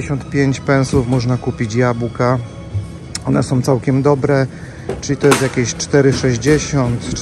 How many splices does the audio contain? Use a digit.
0